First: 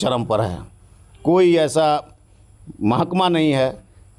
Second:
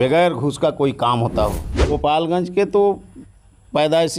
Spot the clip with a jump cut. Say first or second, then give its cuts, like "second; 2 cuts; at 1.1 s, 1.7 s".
second; 1 cut; at 1.9 s